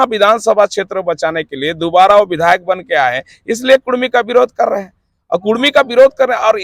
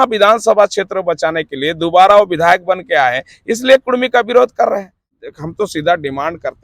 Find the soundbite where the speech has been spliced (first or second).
second